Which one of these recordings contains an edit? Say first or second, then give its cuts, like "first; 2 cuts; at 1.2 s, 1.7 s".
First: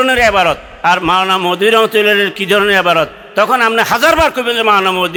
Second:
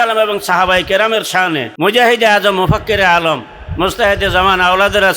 second; 1 cut; at 1.7 s